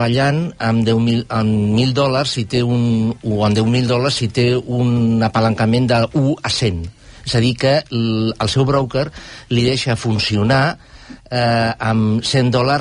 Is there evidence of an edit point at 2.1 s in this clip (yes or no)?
no